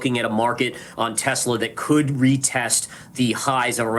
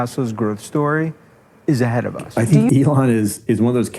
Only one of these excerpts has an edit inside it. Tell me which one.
second; 1 cut; at 2.3 s

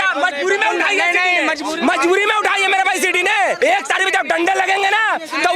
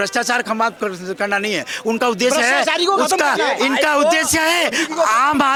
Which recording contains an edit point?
first; 1 cut; at 3.6 s

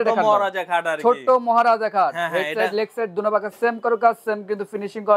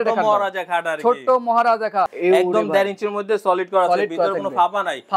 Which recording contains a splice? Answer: second; 1 cut; at 2.1 s

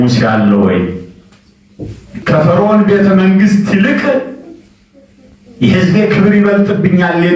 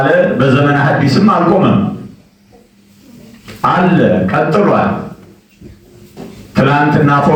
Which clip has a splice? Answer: first; 1 cut; at 2.1 s

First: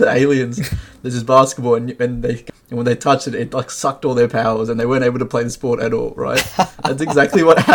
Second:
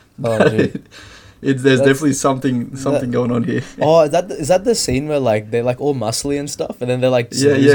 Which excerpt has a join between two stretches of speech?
first; 1 cut; at 2.4 s

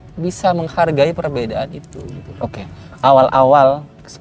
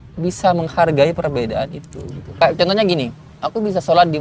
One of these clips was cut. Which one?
second; 1 cut; at 2.4 s

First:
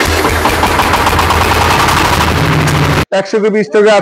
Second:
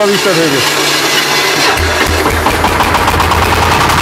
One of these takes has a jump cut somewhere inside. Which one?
first; 1 cut; at 3.0 s

